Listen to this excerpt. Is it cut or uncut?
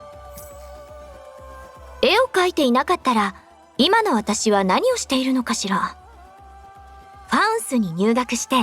cut